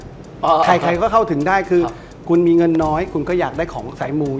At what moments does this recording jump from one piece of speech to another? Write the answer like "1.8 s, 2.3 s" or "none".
none